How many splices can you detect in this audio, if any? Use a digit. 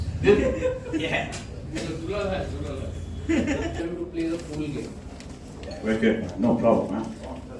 1